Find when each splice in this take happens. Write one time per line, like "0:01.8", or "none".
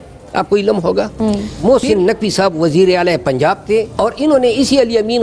0:01.5
0:03.9